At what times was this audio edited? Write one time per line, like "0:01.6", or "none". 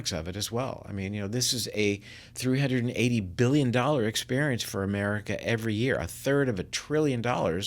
none